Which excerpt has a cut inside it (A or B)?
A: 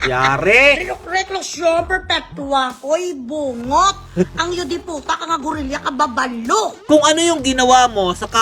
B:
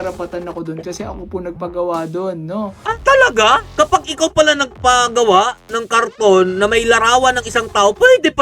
A